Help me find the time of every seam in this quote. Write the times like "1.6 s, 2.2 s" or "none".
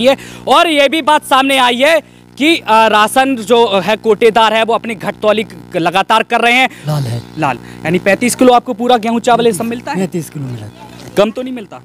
6.8 s